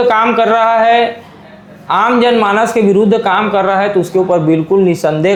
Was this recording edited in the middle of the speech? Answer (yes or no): no